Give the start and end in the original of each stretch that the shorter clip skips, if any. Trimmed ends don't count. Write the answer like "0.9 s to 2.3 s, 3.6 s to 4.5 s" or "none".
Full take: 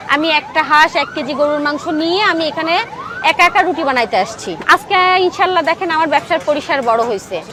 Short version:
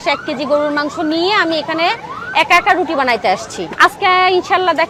none